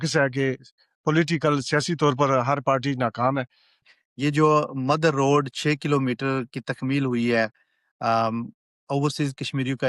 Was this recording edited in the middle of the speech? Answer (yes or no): yes